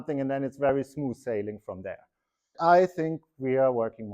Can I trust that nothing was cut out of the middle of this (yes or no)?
no